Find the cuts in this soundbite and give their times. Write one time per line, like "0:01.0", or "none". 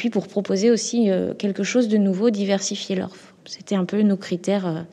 0:03.0